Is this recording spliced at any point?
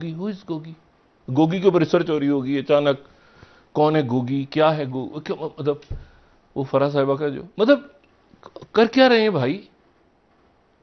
no; 0 cuts

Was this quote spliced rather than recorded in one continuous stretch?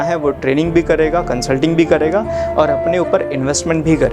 no; 0 cuts

